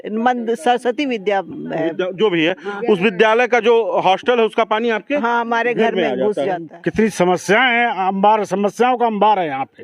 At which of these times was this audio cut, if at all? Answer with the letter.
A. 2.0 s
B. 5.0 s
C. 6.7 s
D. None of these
C